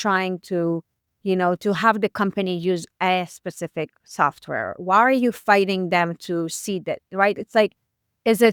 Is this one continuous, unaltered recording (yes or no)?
yes